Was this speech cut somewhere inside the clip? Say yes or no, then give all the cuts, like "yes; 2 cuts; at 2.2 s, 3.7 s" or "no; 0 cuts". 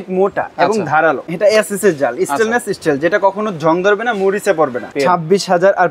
yes; 2 cuts; at 1.2 s, 4.9 s